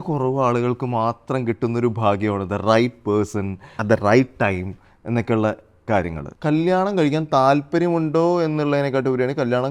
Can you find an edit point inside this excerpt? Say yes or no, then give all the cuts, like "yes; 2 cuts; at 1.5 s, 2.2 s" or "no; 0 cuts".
yes; 2 cuts; at 3.7 s, 6.2 s